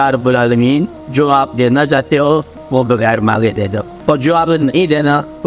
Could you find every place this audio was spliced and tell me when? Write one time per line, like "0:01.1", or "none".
0:01.0
0:02.6
0:03.9